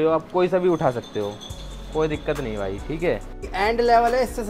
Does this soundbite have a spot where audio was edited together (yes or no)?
yes